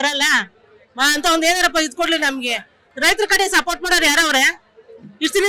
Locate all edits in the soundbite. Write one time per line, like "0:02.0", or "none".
0:02.9